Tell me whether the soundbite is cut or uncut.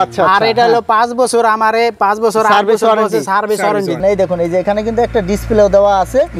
cut